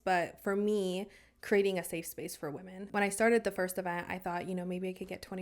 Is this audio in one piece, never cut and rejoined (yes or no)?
no